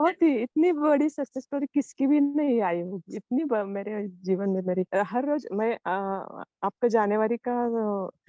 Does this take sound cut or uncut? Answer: cut